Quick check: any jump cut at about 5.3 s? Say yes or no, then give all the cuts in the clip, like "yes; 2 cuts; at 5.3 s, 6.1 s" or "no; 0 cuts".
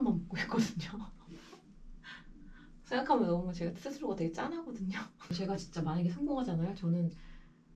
yes; 1 cut; at 5.3 s